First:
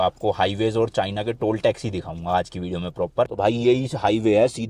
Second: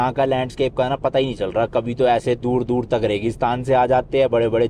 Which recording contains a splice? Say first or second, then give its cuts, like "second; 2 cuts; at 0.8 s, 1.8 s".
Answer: first; 1 cut; at 3.3 s